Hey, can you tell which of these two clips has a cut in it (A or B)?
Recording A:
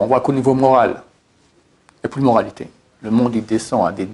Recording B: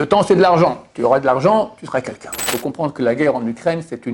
B